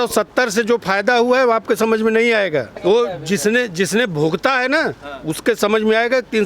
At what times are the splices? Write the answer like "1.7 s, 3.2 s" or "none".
2.7 s

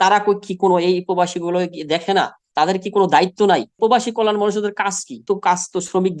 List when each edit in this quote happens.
3.8 s, 5.2 s

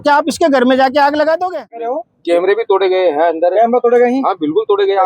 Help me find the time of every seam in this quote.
2.1 s

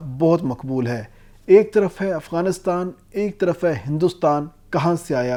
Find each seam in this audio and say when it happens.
none

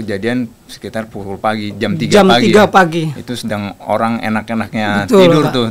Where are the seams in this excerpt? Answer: none

